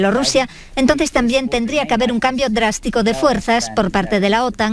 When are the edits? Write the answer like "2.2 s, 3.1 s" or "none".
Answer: none